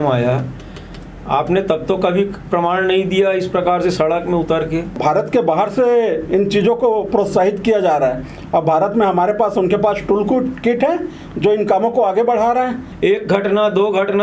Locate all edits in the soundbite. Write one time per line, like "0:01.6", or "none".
0:05.0
0:12.8